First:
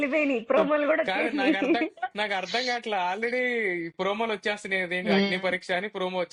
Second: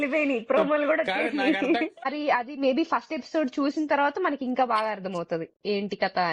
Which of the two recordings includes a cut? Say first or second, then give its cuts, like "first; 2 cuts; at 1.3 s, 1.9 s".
second; 1 cut; at 2.0 s